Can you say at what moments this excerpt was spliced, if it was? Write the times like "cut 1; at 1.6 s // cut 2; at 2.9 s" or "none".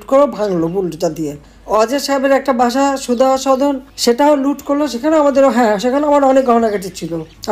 none